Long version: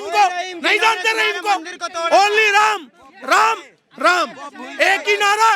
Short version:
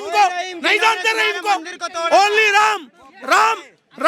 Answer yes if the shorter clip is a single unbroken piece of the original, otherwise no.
yes